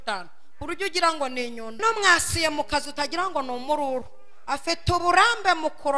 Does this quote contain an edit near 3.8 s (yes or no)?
no